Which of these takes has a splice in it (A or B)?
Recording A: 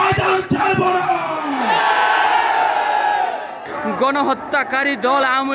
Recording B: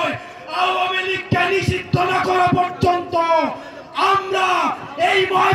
A